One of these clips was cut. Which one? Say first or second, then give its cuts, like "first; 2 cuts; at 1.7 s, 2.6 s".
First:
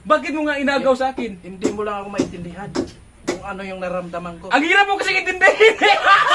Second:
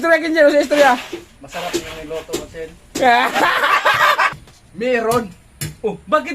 second; 1 cut; at 4.3 s